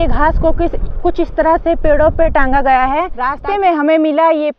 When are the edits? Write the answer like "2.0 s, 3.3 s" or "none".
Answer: 3.3 s